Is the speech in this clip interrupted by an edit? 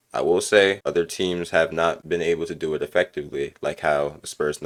no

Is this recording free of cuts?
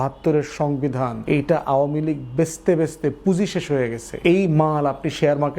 no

